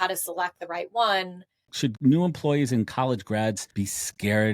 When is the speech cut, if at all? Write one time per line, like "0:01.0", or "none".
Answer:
0:01.9
0:03.7